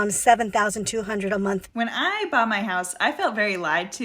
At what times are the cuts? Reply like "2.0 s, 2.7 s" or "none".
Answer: 1.7 s